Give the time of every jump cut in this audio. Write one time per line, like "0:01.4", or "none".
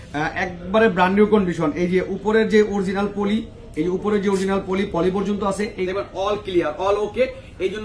0:05.9